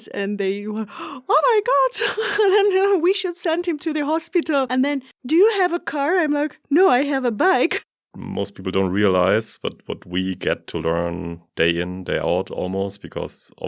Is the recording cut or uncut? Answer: cut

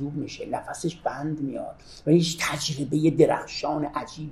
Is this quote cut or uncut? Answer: uncut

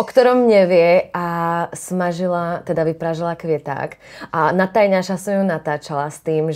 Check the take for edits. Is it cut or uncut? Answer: uncut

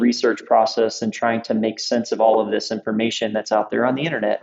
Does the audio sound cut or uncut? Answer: uncut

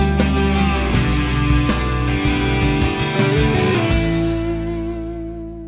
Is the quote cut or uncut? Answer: cut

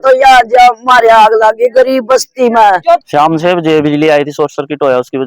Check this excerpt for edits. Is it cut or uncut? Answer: cut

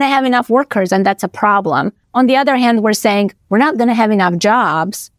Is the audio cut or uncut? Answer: uncut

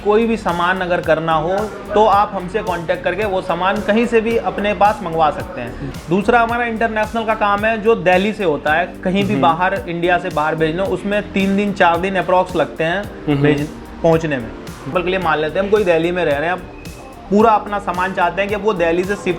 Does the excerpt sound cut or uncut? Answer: cut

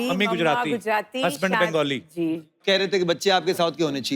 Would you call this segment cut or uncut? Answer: cut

